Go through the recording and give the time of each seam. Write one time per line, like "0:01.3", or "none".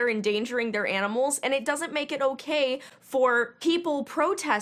none